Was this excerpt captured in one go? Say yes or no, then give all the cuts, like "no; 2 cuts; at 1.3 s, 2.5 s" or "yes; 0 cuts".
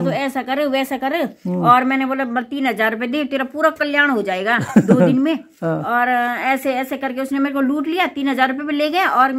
yes; 0 cuts